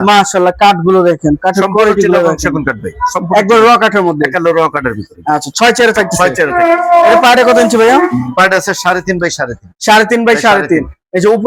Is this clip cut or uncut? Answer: uncut